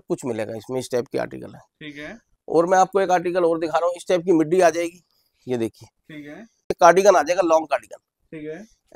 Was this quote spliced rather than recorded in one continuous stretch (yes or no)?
yes